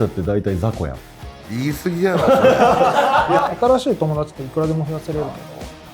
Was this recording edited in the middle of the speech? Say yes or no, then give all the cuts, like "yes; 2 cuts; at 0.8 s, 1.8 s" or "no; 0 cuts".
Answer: yes; 1 cut; at 3.4 s